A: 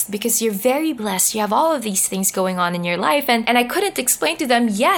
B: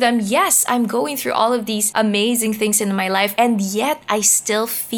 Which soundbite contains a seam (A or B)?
B